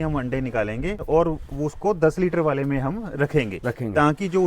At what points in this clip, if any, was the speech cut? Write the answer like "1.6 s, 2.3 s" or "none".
1.0 s